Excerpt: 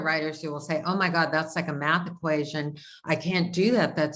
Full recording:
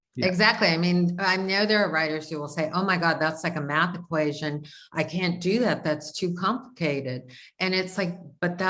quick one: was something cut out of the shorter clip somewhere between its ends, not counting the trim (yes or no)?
no